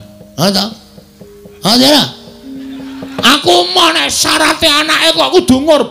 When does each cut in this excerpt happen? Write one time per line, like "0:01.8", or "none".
0:04.2